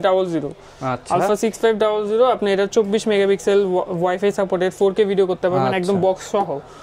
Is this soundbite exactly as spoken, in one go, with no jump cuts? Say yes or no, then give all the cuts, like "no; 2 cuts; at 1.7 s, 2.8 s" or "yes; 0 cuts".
yes; 0 cuts